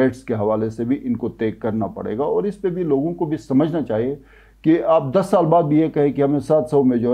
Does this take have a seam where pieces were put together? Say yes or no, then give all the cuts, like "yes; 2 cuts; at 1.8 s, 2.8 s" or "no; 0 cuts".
no; 0 cuts